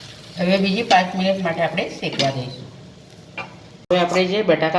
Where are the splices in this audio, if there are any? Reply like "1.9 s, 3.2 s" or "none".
3.4 s